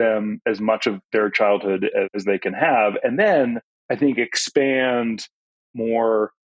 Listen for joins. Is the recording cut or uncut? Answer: uncut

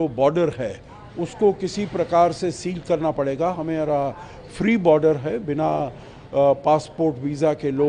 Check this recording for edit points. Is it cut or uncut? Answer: uncut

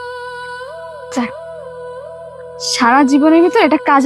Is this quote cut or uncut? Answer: uncut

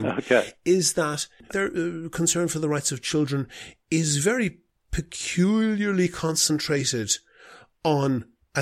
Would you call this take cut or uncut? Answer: cut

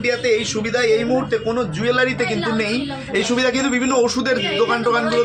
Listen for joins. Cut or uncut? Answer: uncut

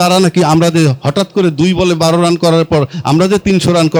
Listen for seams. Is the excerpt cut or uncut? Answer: uncut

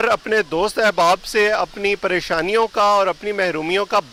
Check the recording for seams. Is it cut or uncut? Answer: uncut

